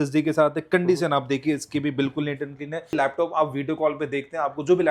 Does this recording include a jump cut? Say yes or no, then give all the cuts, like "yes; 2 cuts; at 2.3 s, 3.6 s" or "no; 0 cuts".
yes; 1 cut; at 2.9 s